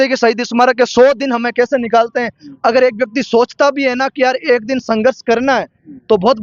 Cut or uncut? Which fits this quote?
uncut